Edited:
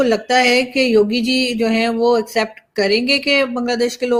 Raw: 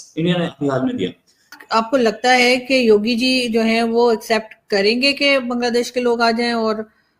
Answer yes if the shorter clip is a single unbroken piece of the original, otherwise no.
yes